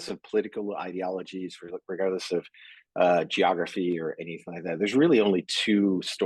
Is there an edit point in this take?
no; 0 cuts

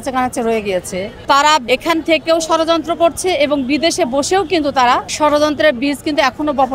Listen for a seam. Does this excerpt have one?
yes; 3 cuts; at 1.1 s, 1.6 s, 5.1 s

